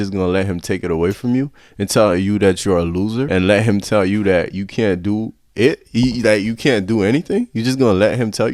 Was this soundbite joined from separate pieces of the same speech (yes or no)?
no